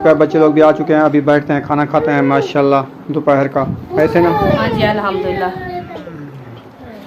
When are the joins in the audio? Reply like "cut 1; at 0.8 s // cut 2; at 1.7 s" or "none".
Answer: cut 1; at 5.9 s